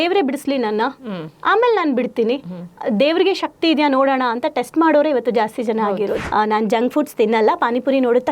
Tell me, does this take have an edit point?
yes; 1 cut; at 6.2 s

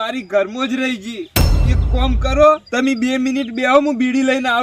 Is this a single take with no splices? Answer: yes; 0 cuts

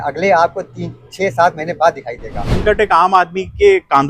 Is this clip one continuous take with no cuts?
no; 1 cut; at 2.6 s

